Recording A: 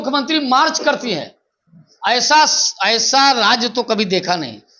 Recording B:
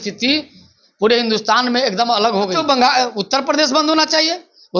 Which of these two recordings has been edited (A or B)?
B